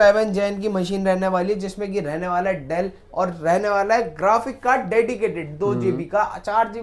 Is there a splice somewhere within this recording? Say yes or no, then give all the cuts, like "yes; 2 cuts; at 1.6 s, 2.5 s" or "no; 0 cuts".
no; 0 cuts